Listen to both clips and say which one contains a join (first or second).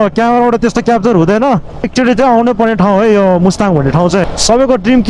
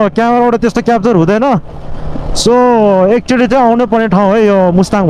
first